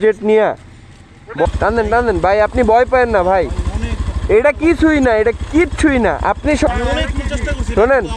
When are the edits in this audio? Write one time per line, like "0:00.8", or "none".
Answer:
0:01.5
0:06.7